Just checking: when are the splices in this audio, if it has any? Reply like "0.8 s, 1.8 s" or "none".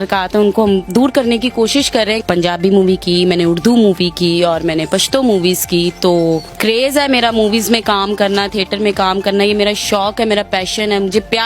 2.2 s, 6.5 s